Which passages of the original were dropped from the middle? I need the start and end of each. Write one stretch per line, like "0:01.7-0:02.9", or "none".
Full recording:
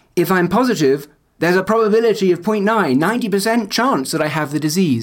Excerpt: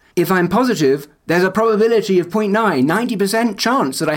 0:01.1-0:01.3